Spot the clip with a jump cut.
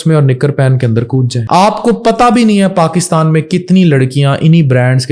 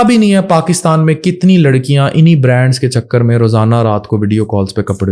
first; 1 cut; at 1.4 s

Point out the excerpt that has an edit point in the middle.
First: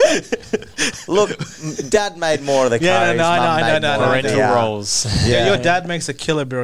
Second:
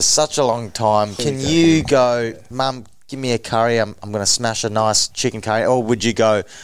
second; 3 cuts; at 1.2 s, 2.4 s, 5.1 s

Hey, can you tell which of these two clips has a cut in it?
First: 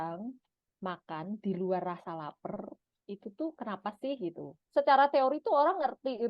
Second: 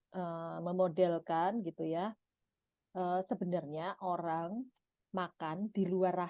first; 1 cut; at 4.6 s

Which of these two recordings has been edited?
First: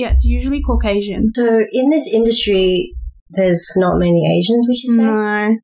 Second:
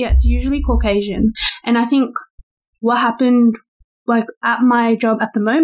first; 1 cut; at 1.3 s

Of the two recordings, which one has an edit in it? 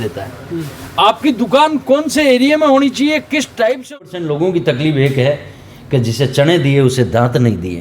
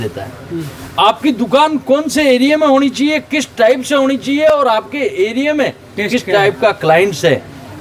first; 1 cut; at 4.0 s

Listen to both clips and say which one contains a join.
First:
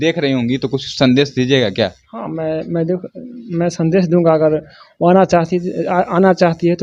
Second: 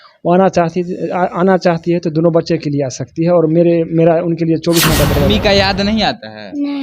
second; 1 cut; at 5.3 s

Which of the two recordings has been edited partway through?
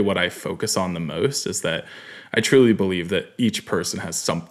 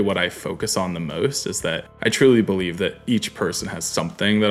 second; 1 cut; at 1.9 s

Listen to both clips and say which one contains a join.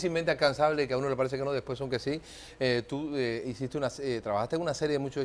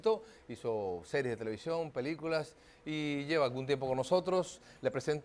first; 1 cut; at 4.0 s

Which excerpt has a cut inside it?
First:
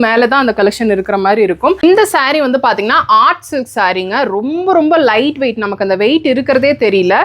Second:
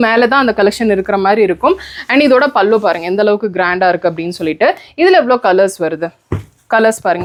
first; 1 cut; at 1.8 s

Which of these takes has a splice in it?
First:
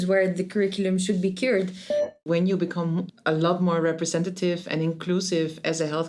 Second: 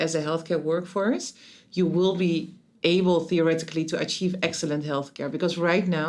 first; 2 cuts; at 2.2 s, 3.1 s

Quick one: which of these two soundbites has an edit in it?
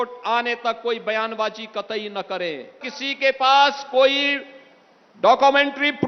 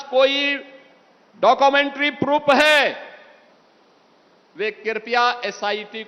first; 1 cut; at 2.9 s

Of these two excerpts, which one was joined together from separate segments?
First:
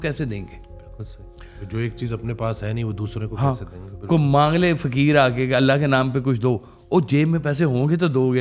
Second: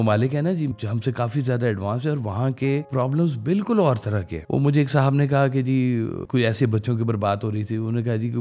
second; 4 cuts; at 0.7 s, 2.9 s, 4.3 s, 6.2 s

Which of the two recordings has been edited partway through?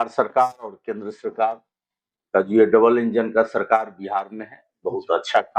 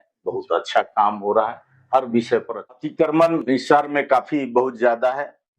second; 1 cut; at 2.7 s

